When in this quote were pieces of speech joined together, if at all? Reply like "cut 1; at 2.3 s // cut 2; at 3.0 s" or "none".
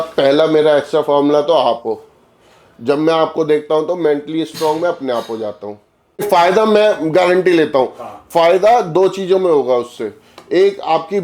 cut 1; at 6.3 s